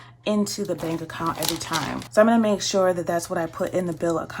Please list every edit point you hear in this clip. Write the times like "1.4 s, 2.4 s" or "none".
2.0 s